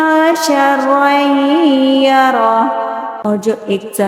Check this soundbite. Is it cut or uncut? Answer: cut